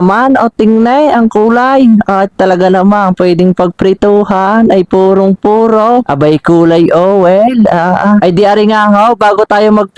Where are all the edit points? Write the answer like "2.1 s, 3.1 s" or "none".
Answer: none